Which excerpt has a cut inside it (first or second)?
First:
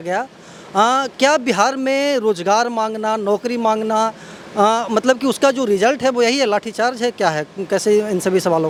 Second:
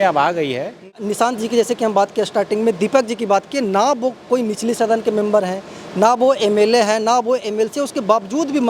second